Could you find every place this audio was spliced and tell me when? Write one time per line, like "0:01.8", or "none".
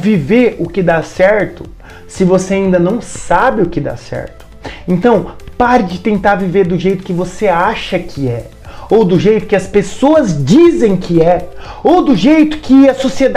none

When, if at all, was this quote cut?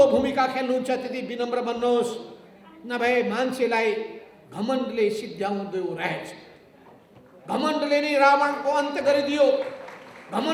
none

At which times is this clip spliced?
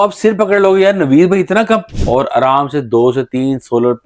0:01.9

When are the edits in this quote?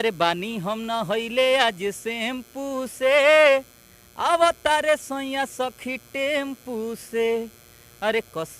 none

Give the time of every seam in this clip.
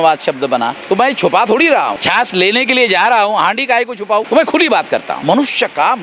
0:02.0
0:04.3
0:05.1

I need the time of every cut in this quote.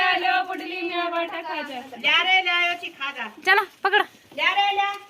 none

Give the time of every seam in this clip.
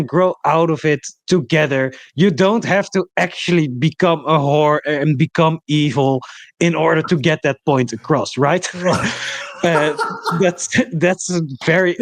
none

